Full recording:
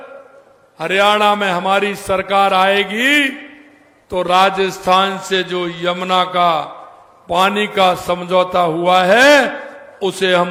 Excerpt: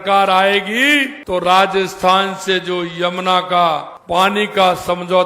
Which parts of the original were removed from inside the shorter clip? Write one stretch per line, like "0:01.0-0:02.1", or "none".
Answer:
0:03.4-0:04.0
0:06.8-0:07.1

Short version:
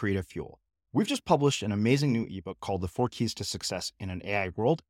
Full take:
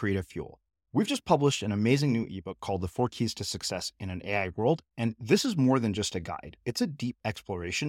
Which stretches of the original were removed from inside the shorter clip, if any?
none

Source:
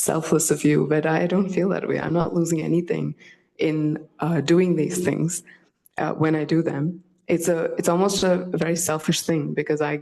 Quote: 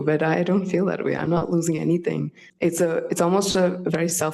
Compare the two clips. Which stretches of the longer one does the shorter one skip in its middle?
0:03.2-0:07.1

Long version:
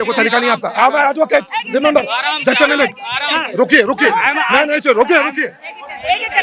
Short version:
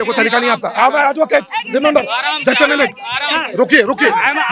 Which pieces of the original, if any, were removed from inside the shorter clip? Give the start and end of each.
none

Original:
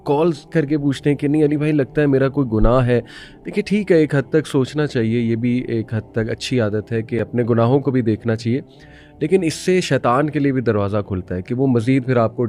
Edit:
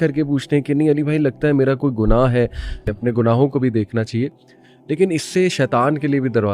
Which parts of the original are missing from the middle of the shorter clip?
0:03.4-0:07.2

